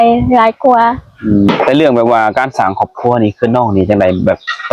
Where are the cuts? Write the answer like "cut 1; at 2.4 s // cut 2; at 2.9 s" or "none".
cut 1; at 1.5 s